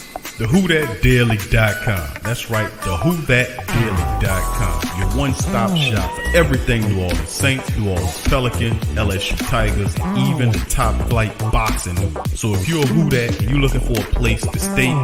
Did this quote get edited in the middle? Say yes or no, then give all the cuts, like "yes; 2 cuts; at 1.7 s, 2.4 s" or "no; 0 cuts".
no; 0 cuts